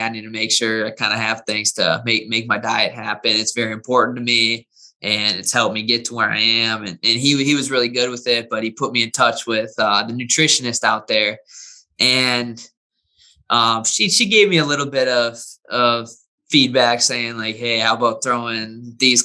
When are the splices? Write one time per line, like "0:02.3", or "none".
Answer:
none